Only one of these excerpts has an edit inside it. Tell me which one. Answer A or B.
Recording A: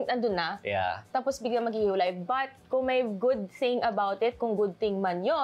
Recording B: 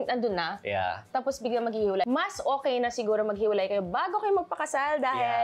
B